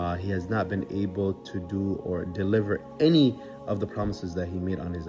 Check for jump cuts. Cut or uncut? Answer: uncut